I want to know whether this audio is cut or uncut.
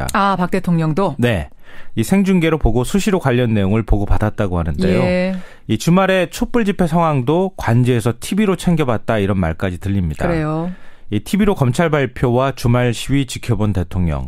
cut